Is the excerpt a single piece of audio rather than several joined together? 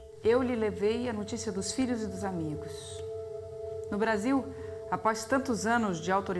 no; 1 cut; at 2.9 s

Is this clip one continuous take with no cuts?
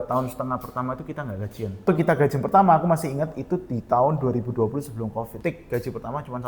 no; 2 cuts; at 1.8 s, 5.3 s

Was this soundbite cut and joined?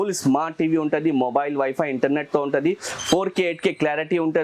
no; 0 cuts

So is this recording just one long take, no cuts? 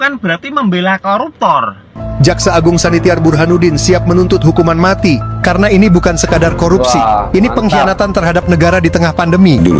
no; 1 cut; at 2.0 s

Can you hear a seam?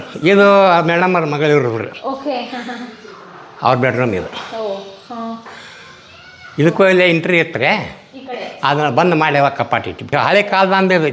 yes; 1 cut; at 10.1 s

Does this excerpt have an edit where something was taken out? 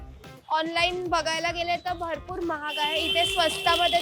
no; 0 cuts

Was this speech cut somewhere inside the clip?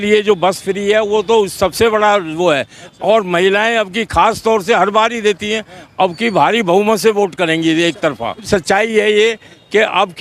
yes; 1 cut; at 8.4 s

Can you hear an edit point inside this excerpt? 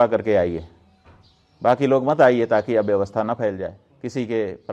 no; 0 cuts

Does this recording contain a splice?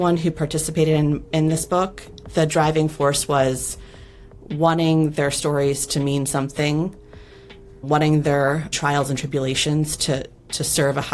yes; 2 cuts; at 2.2 s, 7.9 s

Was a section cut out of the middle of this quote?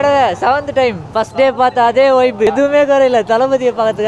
yes; 1 cut; at 2.5 s

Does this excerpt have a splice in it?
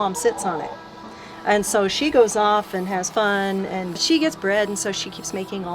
yes; 1 cut; at 4.0 s

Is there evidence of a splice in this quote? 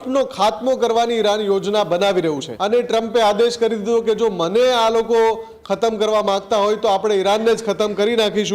yes; 1 cut; at 2.5 s

